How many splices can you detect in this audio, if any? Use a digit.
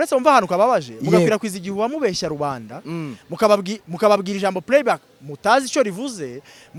0